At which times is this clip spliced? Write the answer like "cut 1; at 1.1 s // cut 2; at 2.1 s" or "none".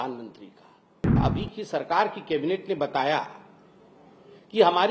cut 1; at 1.2 s